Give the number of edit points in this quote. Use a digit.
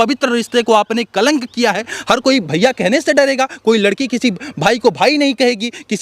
1